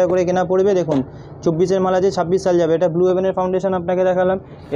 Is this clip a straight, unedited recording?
yes; 0 cuts

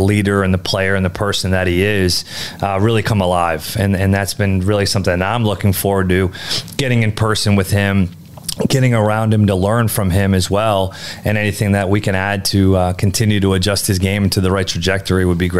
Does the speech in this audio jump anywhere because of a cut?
no; 0 cuts

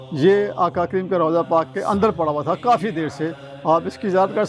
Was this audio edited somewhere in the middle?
no; 0 cuts

